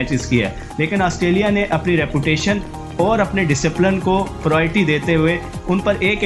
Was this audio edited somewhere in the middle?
no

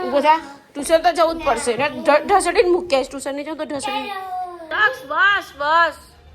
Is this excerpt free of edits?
no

